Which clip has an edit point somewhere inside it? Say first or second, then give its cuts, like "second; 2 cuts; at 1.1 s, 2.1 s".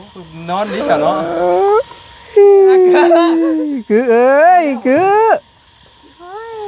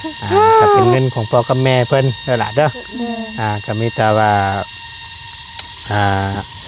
second; 1 cut; at 0.9 s